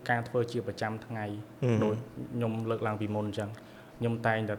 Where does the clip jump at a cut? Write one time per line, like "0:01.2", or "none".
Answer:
none